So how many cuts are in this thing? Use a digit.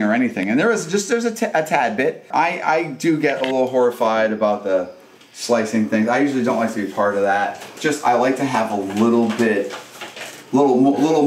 2